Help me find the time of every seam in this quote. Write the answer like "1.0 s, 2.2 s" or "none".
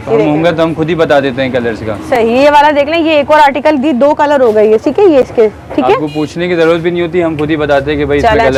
none